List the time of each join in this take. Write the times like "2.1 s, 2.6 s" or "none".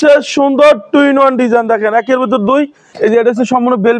2.9 s